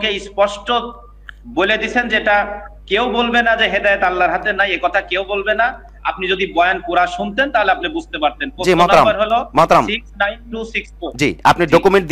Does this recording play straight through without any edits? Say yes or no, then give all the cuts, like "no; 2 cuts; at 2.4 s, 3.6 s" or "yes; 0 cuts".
yes; 0 cuts